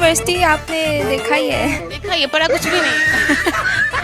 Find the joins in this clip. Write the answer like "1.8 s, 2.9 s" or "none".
1.8 s